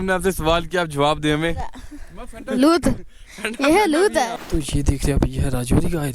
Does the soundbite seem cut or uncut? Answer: cut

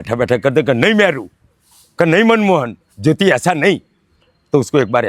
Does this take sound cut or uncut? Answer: uncut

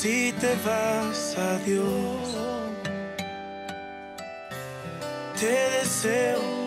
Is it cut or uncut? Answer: uncut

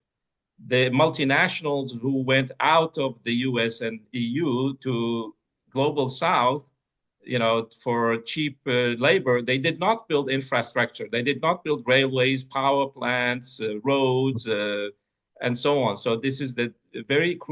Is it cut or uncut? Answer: uncut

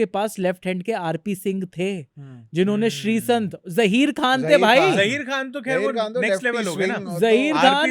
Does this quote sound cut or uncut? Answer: uncut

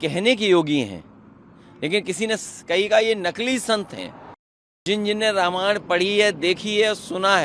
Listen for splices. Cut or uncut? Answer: cut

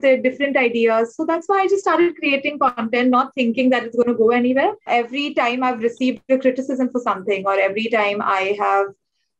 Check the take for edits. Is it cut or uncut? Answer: cut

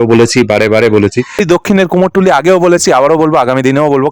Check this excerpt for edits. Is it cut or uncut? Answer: cut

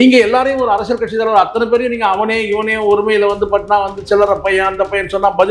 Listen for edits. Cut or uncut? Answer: uncut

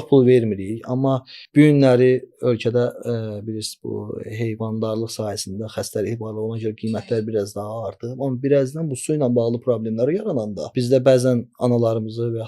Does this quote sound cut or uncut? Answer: cut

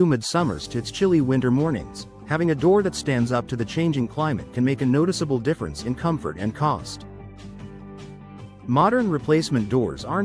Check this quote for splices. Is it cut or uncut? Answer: cut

